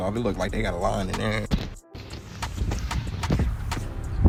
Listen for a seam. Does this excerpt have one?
no; 0 cuts

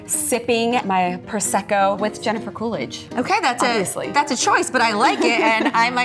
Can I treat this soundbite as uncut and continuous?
no; 2 cuts; at 0.8 s, 2.0 s

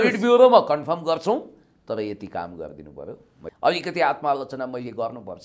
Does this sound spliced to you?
yes; 1 cut; at 3.4 s

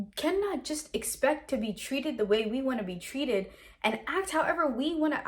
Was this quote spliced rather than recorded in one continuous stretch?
no; 0 cuts

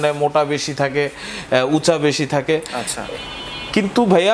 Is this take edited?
no; 0 cuts

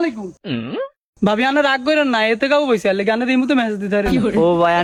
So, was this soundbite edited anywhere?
no; 0 cuts

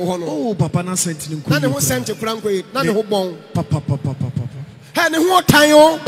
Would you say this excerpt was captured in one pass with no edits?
yes; 0 cuts

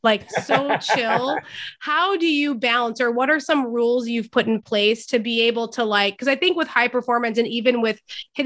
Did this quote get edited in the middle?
no; 0 cuts

